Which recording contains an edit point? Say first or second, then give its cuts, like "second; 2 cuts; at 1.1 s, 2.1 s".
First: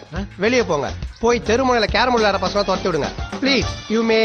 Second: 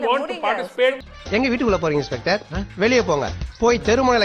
second; 1 cut; at 1.1 s